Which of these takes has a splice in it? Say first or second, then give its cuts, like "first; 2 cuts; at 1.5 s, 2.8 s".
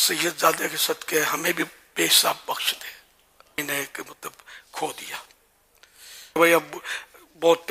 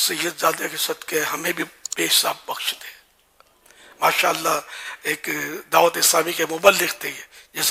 first; 2 cuts; at 3.6 s, 6.4 s